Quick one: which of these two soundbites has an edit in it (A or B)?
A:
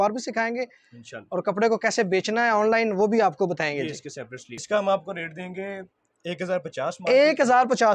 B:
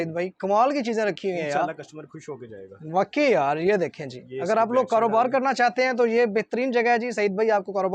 A